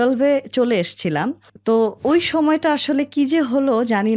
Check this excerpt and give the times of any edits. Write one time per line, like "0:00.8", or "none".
0:01.5